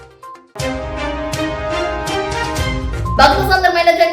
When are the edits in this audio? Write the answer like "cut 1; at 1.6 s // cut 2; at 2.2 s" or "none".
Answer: cut 1; at 3.2 s